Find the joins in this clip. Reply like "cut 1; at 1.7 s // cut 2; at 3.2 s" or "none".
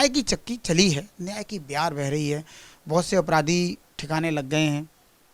none